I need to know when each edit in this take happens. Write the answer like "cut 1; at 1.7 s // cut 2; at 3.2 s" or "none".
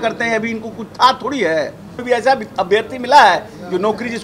cut 1; at 2.0 s